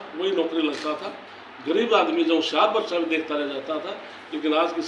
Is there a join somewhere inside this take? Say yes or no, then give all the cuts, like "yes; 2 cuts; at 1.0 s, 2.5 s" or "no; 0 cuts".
no; 0 cuts